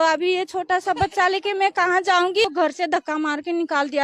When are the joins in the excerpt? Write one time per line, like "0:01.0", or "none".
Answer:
0:02.4

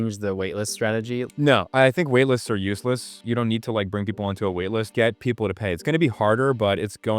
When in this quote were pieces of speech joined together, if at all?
0:01.3
0:03.2
0:04.9

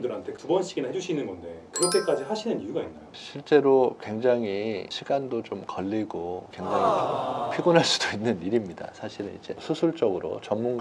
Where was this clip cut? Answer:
0:06.5
0:09.6

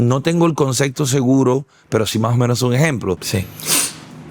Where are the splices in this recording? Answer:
0:03.2

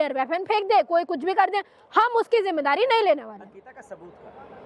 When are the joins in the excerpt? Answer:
none

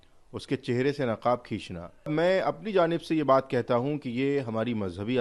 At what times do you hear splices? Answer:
0:02.1

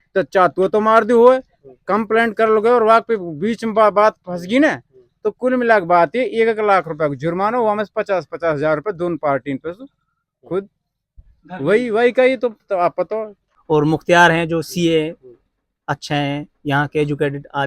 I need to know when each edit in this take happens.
0:13.6

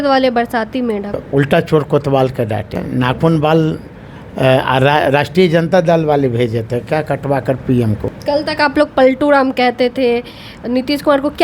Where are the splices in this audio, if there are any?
0:01.2
0:02.8
0:08.1

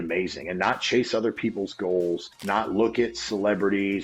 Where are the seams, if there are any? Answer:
0:02.3

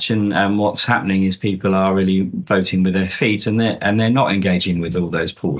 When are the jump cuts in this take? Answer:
none

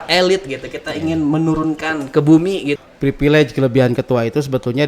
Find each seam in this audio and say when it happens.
0:02.8

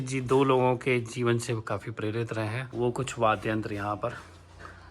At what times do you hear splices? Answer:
0:02.6

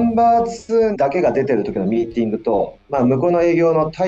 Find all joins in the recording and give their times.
0:00.9
0:02.8

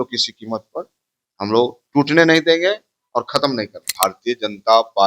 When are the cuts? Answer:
0:03.9

